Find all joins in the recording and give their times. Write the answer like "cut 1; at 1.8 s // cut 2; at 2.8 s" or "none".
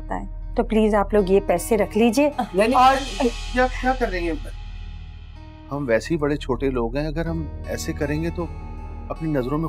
none

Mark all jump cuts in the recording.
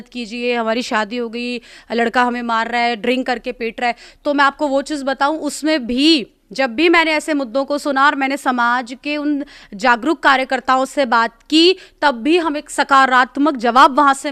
none

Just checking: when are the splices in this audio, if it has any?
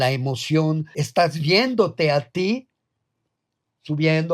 cut 1; at 0.9 s

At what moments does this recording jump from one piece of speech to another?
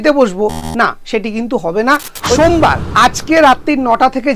cut 1; at 2.4 s

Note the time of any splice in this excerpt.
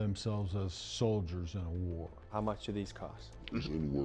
cut 1; at 2.2 s

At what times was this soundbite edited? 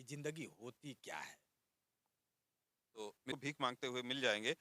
cut 1; at 3.3 s

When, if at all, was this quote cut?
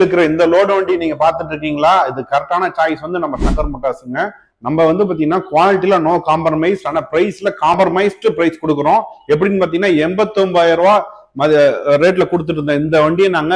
none

